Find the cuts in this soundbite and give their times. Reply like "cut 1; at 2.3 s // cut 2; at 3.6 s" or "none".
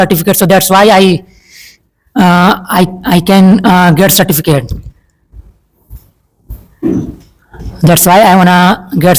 none